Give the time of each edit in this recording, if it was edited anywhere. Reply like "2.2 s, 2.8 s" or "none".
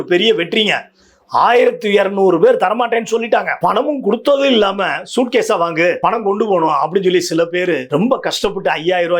3.5 s, 6.0 s, 7.8 s